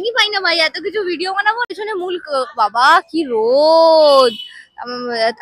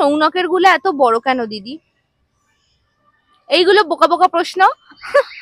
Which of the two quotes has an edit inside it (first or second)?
first